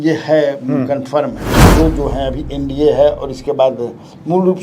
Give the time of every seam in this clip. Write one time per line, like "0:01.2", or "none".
0:01.6